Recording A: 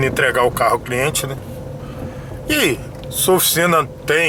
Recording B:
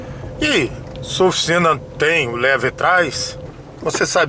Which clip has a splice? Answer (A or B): B